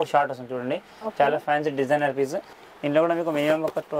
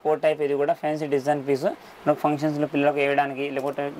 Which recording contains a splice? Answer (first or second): first